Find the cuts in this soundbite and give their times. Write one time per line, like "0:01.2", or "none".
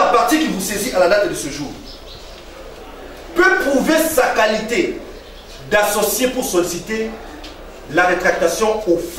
none